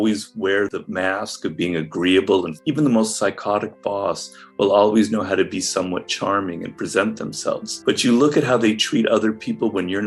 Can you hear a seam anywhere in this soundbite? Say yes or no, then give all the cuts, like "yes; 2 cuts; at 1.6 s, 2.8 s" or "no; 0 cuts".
yes; 2 cuts; at 2.5 s, 7.7 s